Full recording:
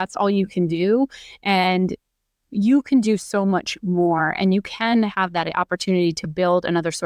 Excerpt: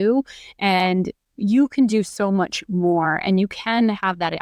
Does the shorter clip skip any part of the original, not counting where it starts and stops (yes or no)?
yes